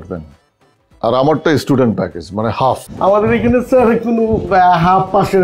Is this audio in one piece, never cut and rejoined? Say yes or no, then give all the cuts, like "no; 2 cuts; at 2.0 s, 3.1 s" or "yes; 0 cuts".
no; 1 cut; at 2.9 s